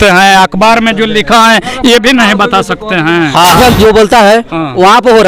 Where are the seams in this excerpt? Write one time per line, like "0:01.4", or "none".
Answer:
0:03.5